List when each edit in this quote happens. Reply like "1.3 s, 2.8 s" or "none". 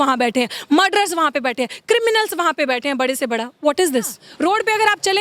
4.2 s